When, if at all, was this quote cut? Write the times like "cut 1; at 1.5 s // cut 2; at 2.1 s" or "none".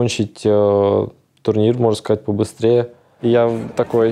cut 1; at 3.0 s

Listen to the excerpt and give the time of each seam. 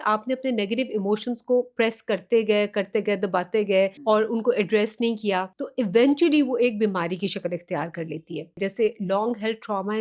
cut 1; at 4.0 s // cut 2; at 5.6 s // cut 3; at 8.6 s

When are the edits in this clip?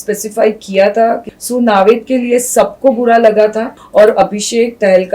cut 1; at 1.3 s // cut 2; at 3.8 s

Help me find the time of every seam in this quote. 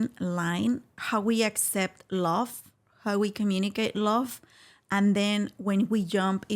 cut 1; at 0.9 s

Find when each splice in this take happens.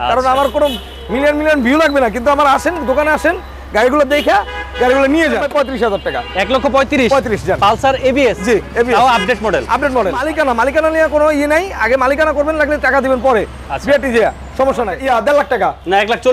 cut 1; at 5.7 s // cut 2; at 10.2 s // cut 3; at 15.0 s

